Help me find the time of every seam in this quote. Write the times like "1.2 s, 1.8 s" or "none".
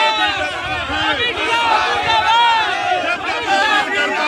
none